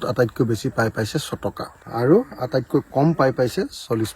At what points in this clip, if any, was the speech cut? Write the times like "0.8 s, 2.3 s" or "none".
1.7 s